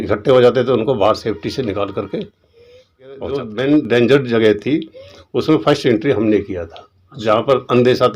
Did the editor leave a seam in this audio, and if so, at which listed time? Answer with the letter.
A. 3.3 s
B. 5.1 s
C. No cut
A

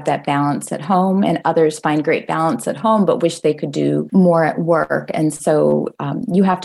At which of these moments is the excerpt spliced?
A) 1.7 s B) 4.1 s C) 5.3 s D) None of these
B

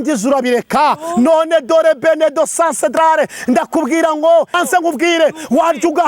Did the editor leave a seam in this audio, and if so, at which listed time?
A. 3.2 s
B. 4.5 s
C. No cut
B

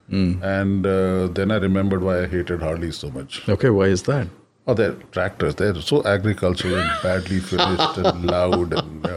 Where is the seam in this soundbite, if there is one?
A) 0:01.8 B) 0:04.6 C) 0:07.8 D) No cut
D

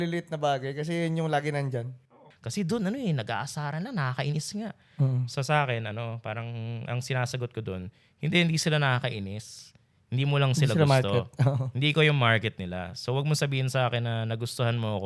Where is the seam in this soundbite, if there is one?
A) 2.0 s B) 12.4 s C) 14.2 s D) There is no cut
A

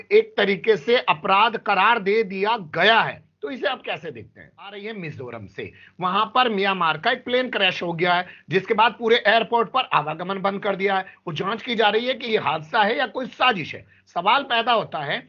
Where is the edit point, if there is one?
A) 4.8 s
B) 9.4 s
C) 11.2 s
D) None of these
A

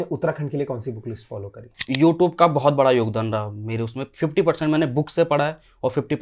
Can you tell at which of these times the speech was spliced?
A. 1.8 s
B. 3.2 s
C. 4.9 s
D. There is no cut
A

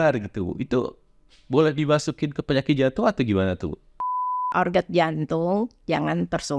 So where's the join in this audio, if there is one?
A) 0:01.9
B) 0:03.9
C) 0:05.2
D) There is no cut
B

